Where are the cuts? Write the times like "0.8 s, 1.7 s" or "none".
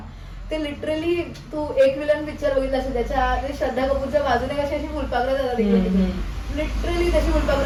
none

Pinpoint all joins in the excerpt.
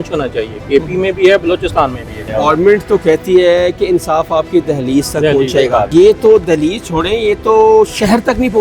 2.2 s, 5.9 s

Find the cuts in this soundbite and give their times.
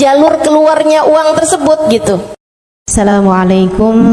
2.9 s

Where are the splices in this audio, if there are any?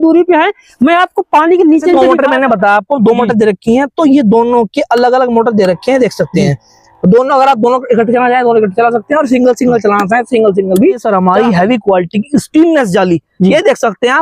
1.9 s, 11.0 s

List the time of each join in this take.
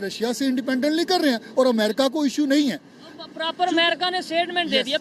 none

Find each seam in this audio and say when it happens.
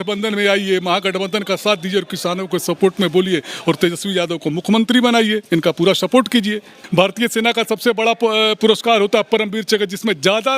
6.7 s

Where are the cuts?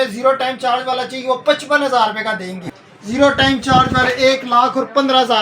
2.6 s

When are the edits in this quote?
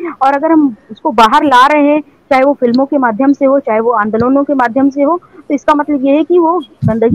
none

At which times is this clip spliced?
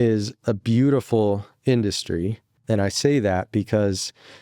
2.5 s

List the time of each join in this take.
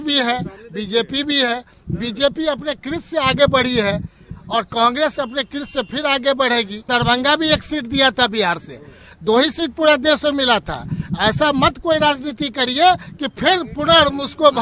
6.8 s

